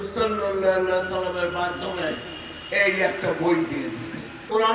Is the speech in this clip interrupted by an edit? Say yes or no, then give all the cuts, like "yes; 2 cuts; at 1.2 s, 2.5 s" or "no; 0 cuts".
no; 0 cuts